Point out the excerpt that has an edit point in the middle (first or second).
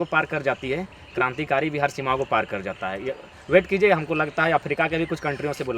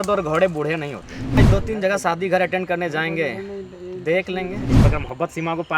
second